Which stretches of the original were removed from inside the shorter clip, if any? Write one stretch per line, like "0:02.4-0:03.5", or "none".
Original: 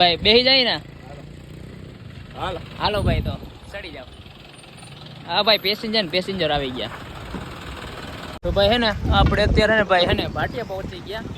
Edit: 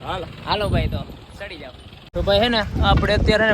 0:04.3-0:08.3